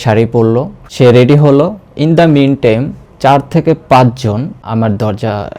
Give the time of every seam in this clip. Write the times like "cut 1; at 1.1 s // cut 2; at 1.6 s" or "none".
cut 1; at 0.9 s // cut 2; at 4.6 s